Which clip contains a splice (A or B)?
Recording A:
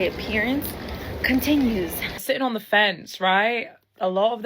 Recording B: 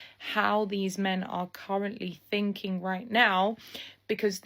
A